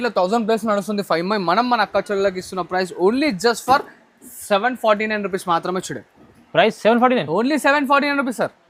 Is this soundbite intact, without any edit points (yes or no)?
yes